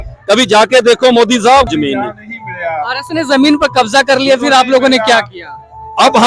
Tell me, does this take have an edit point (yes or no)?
yes